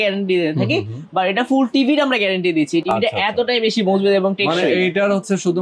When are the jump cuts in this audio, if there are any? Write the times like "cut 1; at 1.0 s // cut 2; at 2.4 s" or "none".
none